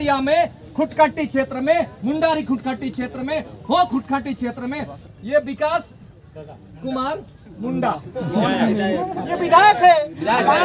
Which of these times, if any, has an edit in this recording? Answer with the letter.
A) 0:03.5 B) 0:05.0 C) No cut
B